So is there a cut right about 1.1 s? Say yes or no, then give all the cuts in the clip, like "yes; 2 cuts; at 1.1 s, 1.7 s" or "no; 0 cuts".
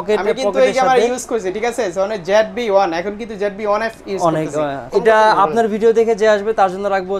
no; 1 cut; at 4.9 s